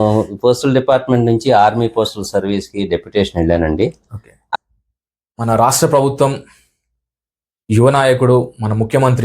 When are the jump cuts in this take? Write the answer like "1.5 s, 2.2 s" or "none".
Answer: 4.4 s